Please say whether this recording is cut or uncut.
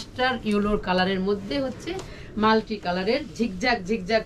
uncut